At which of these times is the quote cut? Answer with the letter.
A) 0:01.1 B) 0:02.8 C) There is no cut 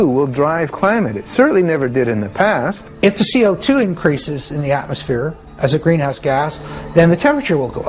B